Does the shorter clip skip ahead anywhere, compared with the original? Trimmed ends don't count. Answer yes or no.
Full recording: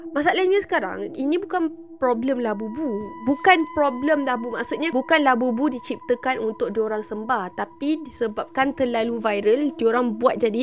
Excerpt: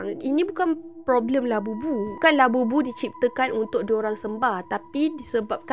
yes